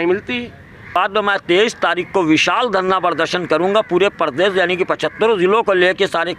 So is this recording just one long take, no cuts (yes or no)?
no